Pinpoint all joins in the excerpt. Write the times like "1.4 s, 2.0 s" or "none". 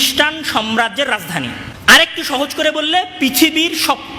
1.7 s